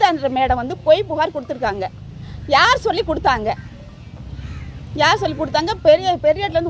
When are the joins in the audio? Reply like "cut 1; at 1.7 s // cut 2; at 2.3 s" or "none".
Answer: none